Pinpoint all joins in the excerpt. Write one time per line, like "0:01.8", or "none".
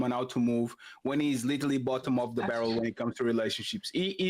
none

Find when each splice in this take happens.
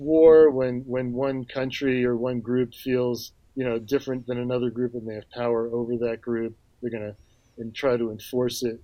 none

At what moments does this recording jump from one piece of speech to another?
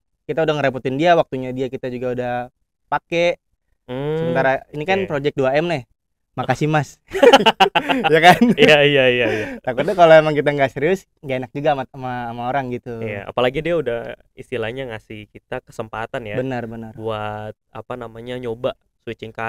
none

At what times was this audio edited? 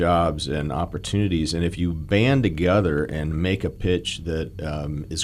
none

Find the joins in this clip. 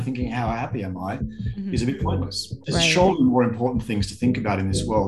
0:02.6

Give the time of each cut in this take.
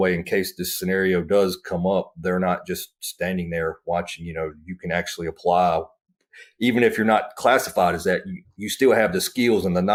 none

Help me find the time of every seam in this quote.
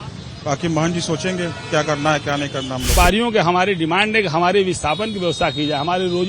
0:02.9

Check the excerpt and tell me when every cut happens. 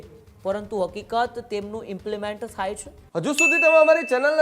0:02.9

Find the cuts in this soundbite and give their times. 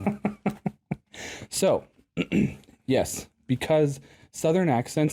none

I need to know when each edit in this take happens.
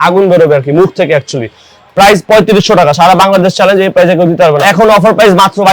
0:04.6

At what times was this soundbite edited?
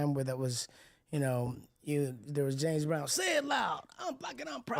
none

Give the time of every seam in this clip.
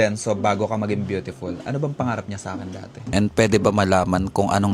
0:03.1

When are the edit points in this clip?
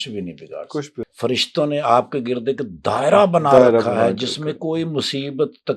0:01.0

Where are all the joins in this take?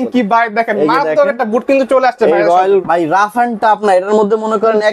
0:02.8

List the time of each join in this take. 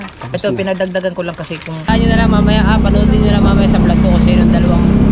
0:01.9

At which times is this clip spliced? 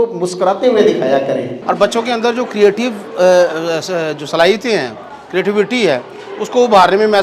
0:01.5

